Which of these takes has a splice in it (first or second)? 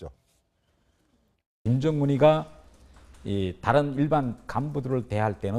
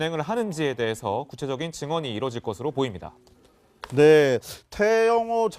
second